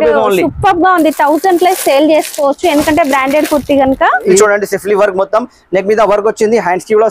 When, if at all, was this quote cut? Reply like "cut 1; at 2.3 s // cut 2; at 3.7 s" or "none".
cut 1; at 4.4 s